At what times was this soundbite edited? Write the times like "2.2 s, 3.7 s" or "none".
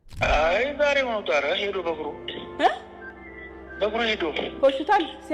none